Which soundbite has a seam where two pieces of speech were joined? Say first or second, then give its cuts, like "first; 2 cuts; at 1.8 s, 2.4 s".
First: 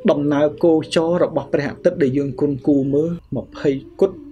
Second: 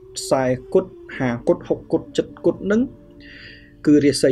first; 1 cut; at 3.2 s